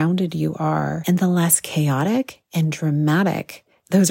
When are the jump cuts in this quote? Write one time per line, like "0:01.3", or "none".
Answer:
0:01.0